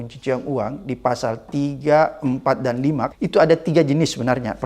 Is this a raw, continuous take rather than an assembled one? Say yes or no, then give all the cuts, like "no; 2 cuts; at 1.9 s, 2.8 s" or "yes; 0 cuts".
no; 1 cut; at 3.1 s